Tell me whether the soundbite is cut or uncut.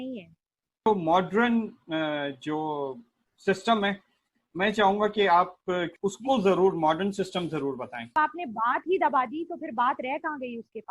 cut